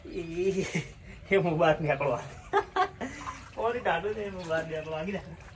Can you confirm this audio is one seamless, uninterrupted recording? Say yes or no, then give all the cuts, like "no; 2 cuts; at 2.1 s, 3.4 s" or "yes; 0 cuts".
yes; 0 cuts